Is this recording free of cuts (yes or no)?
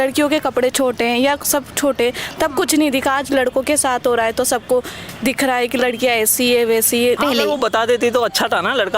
no